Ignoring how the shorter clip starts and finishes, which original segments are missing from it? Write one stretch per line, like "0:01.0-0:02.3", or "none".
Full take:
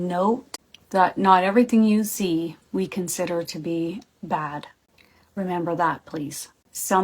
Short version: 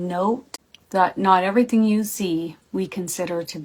none